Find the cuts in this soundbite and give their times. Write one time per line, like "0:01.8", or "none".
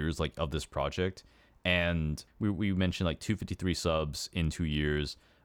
0:02.2